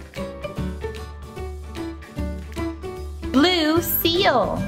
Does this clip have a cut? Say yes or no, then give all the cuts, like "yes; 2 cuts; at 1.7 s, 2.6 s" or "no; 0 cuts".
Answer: no; 0 cuts